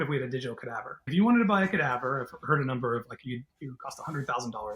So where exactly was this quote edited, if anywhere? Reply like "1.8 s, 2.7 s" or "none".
0.9 s